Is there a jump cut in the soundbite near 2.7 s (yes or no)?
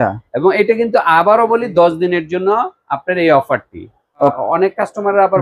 no